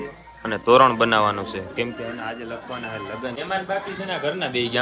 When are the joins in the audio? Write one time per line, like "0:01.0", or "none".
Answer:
0:03.4